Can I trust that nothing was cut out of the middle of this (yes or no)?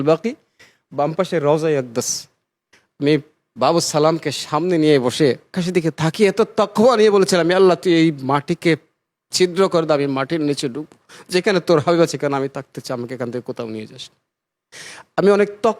no